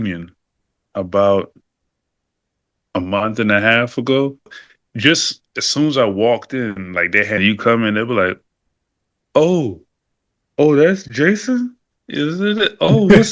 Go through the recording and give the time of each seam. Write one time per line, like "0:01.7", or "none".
0:04.6
0:07.4